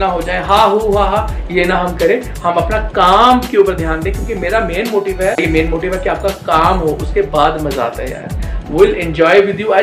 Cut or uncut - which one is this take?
cut